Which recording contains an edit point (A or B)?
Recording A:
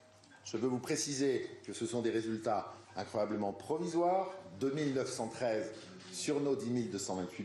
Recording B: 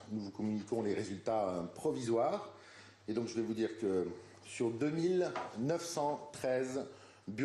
B